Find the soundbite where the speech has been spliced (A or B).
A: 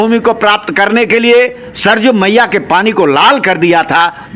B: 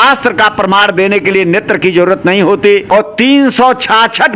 B